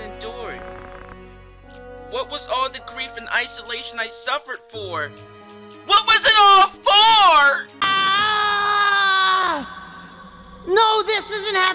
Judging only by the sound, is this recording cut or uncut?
cut